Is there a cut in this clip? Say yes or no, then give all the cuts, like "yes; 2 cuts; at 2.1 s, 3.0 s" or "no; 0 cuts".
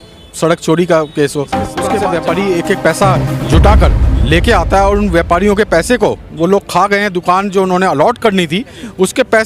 yes; 1 cut; at 1.8 s